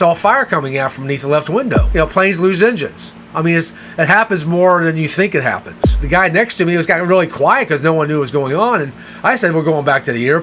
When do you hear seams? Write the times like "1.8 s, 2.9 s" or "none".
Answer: 1.8 s, 5.9 s